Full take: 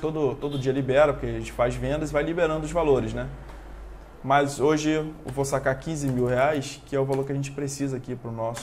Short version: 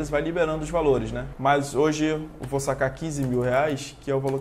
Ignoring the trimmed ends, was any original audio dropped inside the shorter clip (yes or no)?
yes